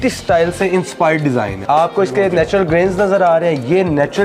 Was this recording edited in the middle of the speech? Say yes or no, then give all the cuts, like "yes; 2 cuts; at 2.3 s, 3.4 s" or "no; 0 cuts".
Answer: yes; 1 cut; at 1.6 s